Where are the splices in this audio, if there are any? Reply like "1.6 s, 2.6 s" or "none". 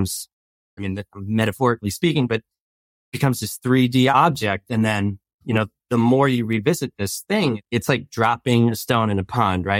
4.1 s, 7.7 s